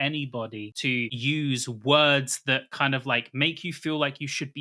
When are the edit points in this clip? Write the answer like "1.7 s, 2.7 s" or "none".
1.0 s